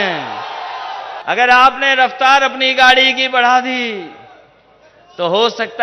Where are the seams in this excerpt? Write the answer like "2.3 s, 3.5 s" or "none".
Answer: 1.1 s